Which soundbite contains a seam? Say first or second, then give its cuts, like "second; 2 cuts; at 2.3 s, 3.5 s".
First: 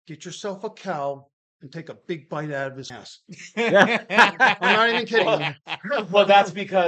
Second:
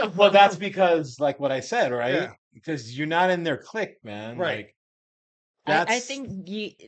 first; 1 cut; at 2.9 s